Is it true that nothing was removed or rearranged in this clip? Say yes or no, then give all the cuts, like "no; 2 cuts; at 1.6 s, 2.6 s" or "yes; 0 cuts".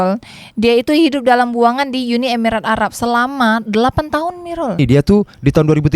no; 1 cut; at 4.8 s